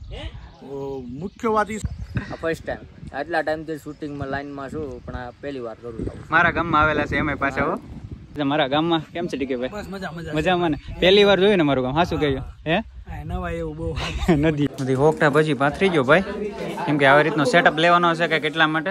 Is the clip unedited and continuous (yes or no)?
no